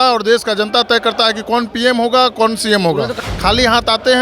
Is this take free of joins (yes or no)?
no